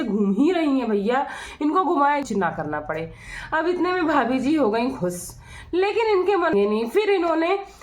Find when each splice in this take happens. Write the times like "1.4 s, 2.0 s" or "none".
2.2 s, 6.5 s